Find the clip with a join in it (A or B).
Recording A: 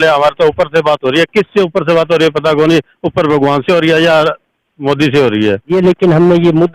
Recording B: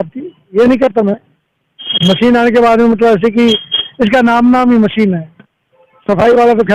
A